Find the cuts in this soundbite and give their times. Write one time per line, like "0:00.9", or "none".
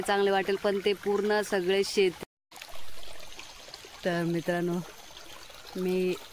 0:02.2